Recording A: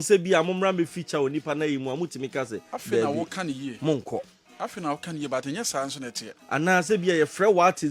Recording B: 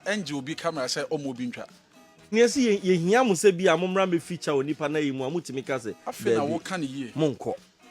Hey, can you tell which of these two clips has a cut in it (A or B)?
B